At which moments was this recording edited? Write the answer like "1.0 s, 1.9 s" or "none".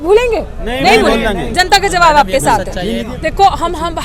none